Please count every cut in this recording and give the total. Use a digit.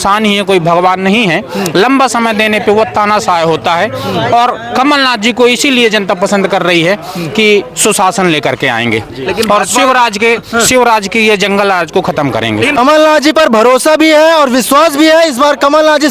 1